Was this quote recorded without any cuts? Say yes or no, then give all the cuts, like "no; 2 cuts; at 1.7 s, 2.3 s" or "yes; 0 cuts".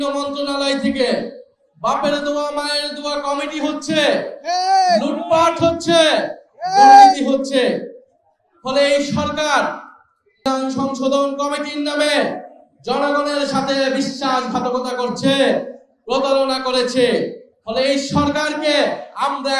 no; 1 cut; at 10.4 s